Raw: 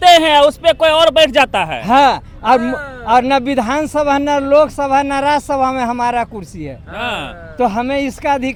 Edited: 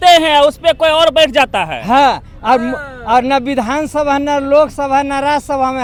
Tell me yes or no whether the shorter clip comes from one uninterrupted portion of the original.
yes